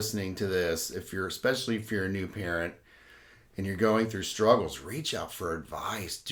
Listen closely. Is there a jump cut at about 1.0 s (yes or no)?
no